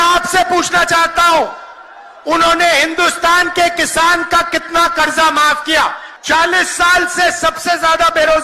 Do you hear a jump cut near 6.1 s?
yes; 1 cut; at 6.1 s

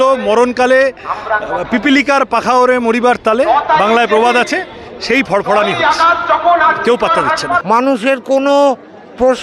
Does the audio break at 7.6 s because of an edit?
yes; 1 cut; at 7.6 s

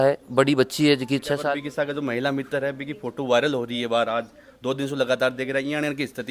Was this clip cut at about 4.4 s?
no; 1 cut; at 1.4 s

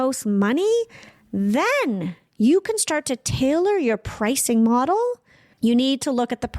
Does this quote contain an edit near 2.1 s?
no; 1 cut; at 5.5 s

